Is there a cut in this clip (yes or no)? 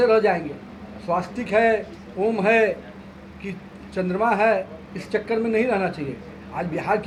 no